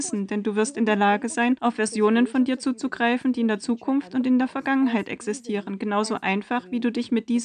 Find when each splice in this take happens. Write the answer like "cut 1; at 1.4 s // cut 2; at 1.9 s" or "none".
cut 1; at 1.6 s